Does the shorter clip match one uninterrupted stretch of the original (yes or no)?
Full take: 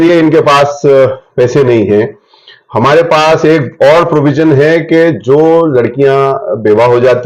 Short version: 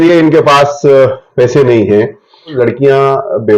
no